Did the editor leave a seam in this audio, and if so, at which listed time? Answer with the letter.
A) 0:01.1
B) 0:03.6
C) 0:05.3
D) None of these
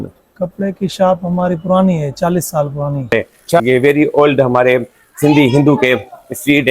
B